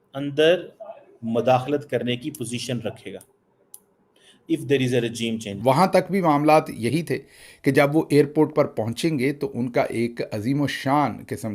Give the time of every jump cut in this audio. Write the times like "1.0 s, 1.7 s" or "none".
5.5 s

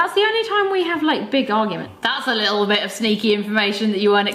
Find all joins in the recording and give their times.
1.9 s

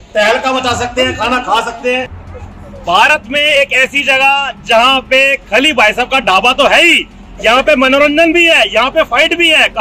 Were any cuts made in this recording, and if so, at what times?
2.2 s

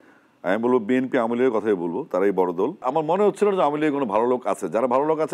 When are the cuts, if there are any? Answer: 2.8 s

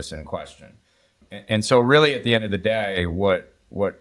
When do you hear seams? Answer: none

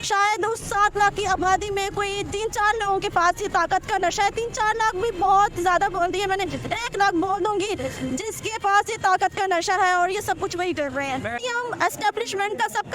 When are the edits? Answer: 11.4 s

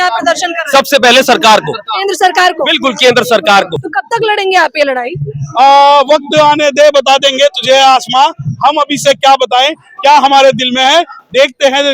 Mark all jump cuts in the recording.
3.8 s

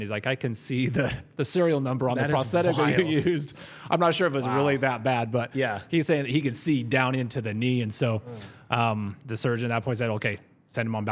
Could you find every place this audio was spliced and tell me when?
none

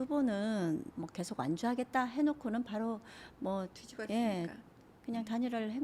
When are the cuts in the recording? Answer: 0.9 s

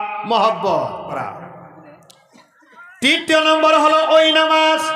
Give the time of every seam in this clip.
1.1 s

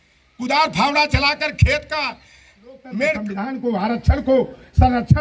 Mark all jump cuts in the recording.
3.3 s

